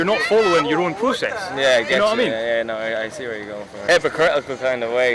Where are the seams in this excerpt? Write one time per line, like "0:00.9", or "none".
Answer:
0:03.9